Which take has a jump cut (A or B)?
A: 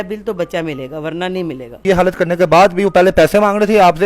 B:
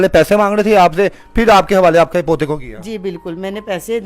A